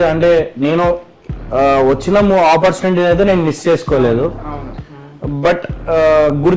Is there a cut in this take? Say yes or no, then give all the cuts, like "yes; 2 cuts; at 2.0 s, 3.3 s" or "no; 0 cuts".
no; 0 cuts